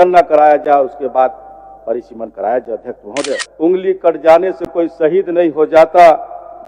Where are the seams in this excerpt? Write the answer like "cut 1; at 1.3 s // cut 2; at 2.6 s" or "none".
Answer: cut 1; at 3.4 s

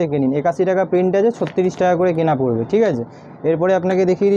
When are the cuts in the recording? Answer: none

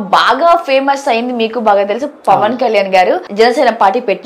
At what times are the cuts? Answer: cut 1; at 3.3 s

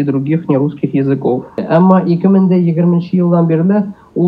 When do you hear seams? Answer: cut 1; at 1.6 s

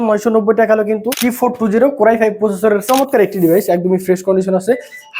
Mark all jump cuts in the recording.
cut 1; at 1.1 s // cut 2; at 2.8 s

